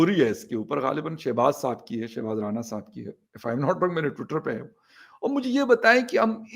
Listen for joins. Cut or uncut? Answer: uncut